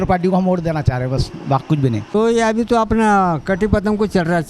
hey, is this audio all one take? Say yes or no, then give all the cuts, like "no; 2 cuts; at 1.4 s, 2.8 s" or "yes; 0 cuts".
no; 1 cut; at 2.1 s